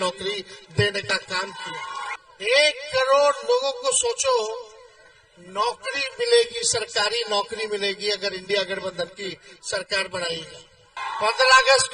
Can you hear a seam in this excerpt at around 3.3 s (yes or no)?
no